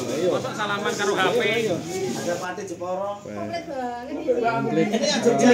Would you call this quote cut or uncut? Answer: cut